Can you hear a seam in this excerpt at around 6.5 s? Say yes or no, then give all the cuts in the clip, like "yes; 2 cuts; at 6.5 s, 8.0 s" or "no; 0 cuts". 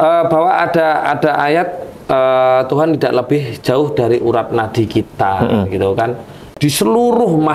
yes; 1 cut; at 6.5 s